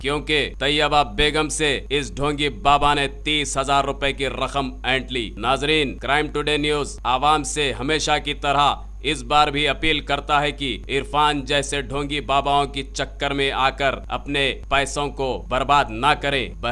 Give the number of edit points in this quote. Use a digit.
1